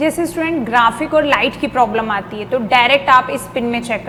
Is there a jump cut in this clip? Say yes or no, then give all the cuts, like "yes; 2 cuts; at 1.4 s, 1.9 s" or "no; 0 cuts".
no; 0 cuts